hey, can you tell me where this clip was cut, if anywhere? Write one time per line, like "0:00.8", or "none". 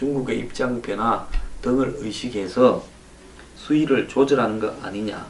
none